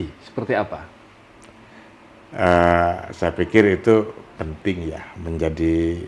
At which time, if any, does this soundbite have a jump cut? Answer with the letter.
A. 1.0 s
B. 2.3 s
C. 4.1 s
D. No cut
D